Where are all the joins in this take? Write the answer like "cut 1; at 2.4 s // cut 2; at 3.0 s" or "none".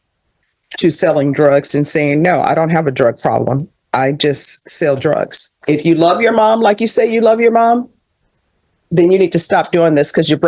cut 1; at 5.6 s